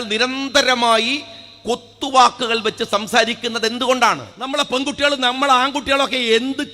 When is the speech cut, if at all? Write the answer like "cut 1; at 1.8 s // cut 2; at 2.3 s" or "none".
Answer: cut 1; at 4.3 s